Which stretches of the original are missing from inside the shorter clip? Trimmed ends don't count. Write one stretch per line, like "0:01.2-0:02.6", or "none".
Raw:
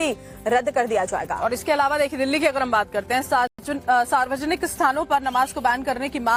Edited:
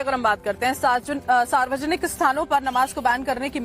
0:03.6-0:03.7